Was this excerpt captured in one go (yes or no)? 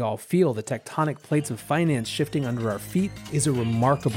no